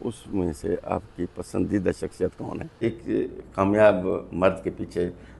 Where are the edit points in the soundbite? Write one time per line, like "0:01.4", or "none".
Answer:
0:02.8